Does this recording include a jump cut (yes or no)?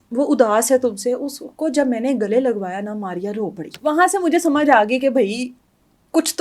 yes